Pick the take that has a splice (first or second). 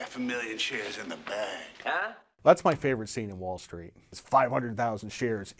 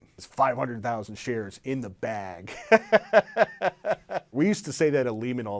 second